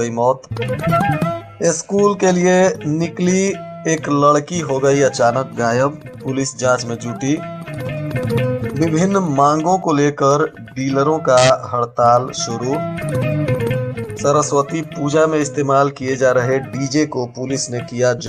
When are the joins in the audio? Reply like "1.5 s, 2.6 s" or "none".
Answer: none